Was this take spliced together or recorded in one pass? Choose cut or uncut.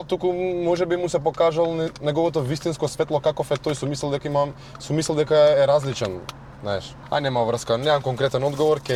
uncut